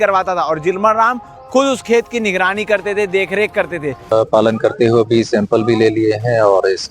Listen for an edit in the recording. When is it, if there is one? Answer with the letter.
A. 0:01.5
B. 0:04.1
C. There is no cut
B